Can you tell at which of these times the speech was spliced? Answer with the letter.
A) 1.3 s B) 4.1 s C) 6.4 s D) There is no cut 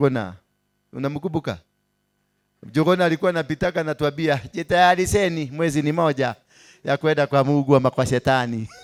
D